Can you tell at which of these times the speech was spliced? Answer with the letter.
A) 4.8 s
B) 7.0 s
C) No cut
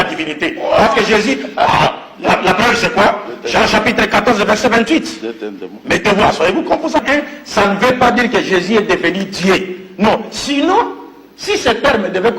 B